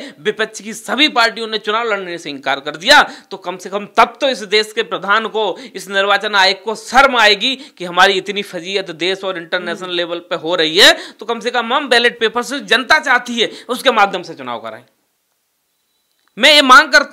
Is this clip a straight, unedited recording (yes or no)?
yes